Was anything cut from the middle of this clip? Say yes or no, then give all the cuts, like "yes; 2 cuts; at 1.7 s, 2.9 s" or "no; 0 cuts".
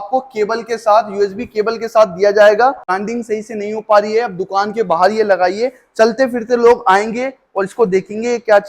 yes; 1 cut; at 2.9 s